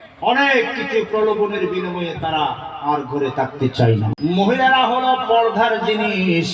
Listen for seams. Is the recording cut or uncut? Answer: cut